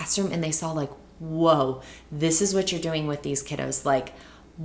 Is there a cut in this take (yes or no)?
no